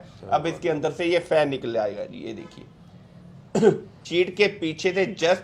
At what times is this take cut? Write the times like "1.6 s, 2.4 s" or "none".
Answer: 4.0 s